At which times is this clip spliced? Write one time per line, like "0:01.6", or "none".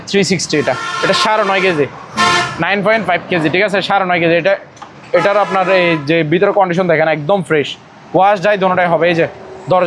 none